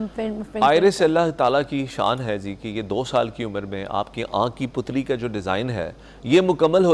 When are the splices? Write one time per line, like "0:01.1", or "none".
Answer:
none